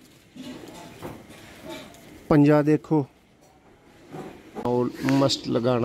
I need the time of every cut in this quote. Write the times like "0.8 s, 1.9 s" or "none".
4.6 s